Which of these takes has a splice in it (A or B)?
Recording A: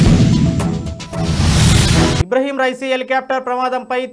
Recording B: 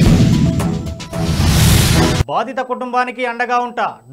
B